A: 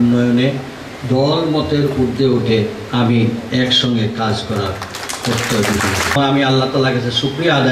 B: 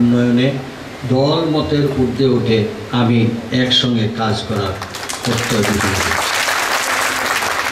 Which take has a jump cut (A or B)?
A